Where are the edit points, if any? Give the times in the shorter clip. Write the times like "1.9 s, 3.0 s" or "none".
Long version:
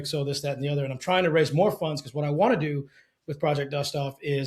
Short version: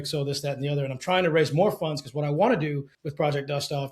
3.0 s